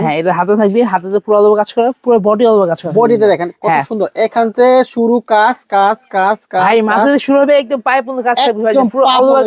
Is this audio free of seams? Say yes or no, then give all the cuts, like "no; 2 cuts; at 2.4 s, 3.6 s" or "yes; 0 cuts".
yes; 0 cuts